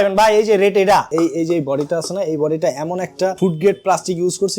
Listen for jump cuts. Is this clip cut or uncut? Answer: cut